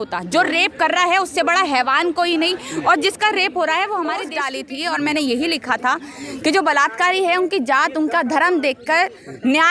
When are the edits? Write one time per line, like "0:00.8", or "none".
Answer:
0:04.4